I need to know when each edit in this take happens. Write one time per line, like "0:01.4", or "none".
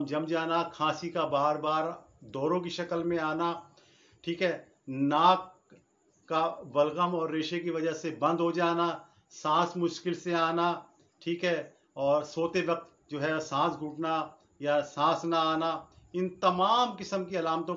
none